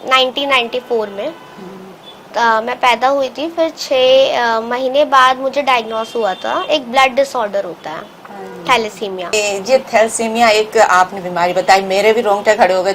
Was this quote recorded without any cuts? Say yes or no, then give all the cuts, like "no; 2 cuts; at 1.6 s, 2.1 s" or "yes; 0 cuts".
no; 1 cut; at 9.3 s